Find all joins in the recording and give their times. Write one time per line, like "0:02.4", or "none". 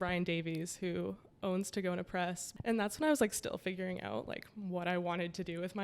0:02.5